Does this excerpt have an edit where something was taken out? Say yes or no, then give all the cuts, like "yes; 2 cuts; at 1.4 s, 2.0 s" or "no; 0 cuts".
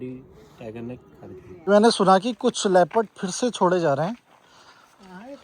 yes; 1 cut; at 1.7 s